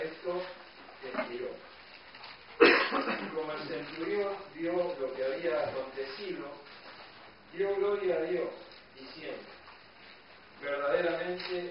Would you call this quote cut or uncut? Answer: cut